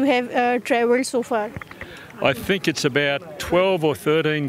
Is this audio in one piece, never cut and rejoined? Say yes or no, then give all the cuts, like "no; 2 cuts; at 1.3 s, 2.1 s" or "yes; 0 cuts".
yes; 0 cuts